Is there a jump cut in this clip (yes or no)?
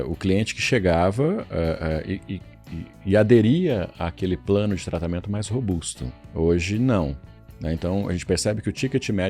yes